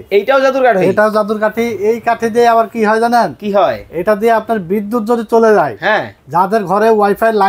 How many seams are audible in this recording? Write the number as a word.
zero